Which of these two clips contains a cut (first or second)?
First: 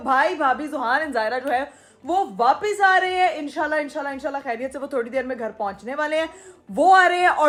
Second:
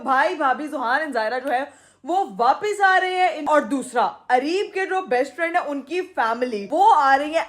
second